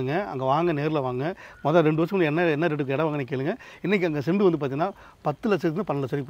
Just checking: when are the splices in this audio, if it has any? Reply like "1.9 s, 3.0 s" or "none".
none